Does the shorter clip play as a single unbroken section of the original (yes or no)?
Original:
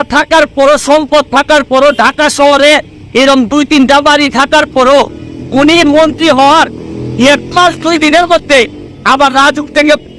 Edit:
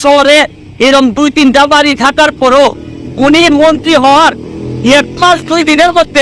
yes